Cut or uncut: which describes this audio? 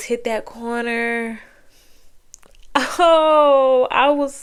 uncut